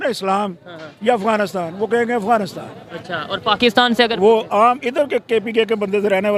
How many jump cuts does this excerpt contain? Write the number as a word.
zero